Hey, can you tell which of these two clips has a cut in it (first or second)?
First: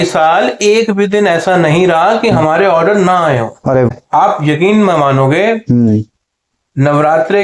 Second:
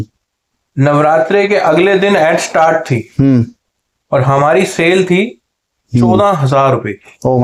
first